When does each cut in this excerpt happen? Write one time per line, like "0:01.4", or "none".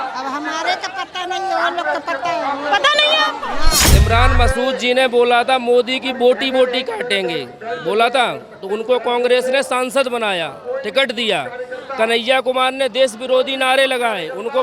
0:03.8